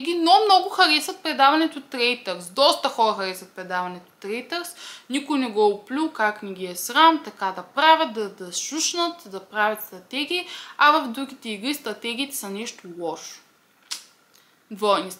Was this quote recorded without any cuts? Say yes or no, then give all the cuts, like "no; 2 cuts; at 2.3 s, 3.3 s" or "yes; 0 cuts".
yes; 0 cuts